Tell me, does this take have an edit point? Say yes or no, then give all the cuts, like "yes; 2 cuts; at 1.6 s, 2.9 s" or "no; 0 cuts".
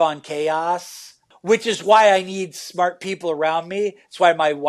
yes; 1 cut; at 1.2 s